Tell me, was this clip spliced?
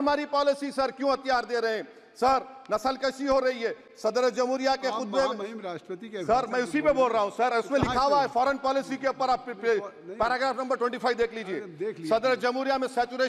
no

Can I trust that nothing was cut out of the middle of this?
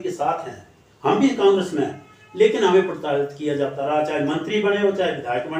yes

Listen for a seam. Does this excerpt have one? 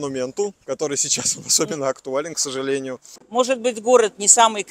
yes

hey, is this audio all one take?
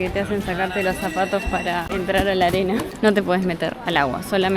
no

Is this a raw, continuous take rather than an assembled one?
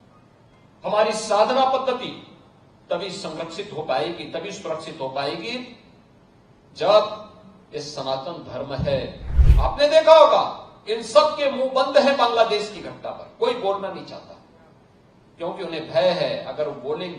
no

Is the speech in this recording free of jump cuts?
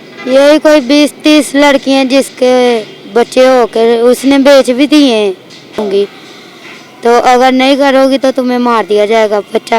no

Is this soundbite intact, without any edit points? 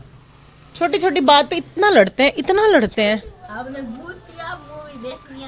yes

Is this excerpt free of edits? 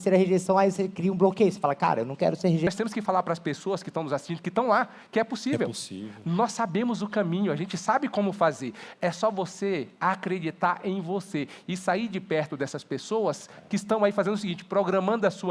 no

